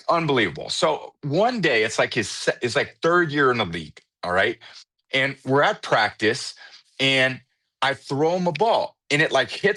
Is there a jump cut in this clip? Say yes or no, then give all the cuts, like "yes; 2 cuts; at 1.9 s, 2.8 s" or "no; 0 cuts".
no; 0 cuts